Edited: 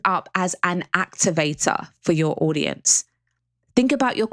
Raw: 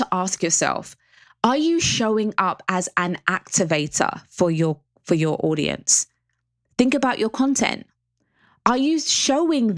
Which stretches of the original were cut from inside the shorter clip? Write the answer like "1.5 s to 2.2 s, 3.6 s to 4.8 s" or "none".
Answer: 4.2 s to 4.9 s